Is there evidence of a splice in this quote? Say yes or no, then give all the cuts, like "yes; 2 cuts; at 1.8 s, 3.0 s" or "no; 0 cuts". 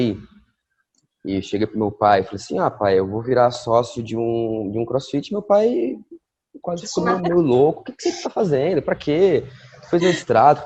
no; 0 cuts